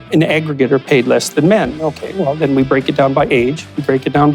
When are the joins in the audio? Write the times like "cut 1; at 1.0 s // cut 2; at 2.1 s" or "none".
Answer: none